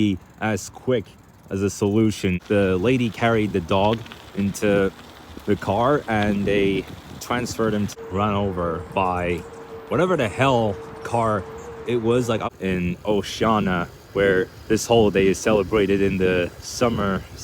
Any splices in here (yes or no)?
yes